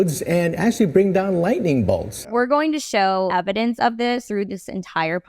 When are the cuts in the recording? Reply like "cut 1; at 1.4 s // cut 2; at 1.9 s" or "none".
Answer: cut 1; at 2.1 s // cut 2; at 3.3 s // cut 3; at 4.2 s